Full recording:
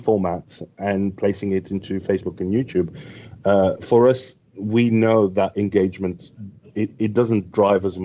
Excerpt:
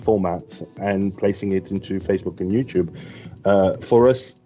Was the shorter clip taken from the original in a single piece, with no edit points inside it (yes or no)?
yes